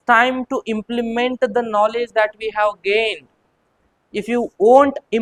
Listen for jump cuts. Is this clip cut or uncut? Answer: uncut